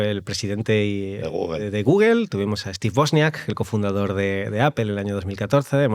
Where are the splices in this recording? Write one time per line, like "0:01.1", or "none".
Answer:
none